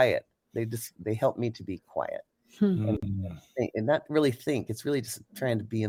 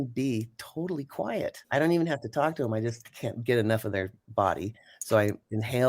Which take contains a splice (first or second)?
second